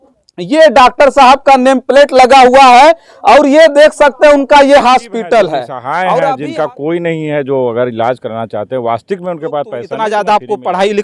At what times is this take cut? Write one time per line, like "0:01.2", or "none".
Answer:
0:06.3
0:09.9